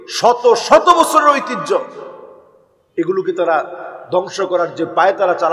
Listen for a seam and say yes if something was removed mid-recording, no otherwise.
no